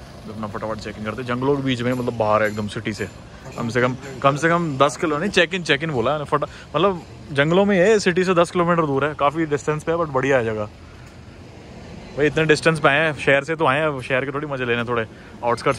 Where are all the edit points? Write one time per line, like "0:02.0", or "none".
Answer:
none